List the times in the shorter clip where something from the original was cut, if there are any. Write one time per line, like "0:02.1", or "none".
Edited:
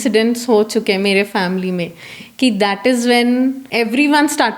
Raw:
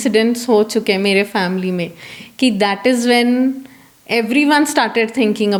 0:03.6